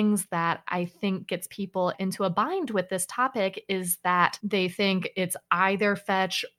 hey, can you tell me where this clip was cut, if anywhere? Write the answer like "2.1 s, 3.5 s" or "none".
4.4 s